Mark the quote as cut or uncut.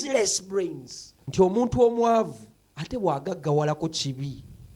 cut